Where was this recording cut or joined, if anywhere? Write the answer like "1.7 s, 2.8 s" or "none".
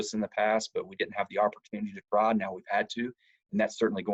none